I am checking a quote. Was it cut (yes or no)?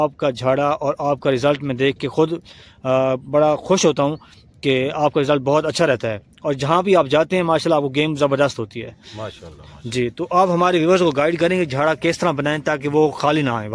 no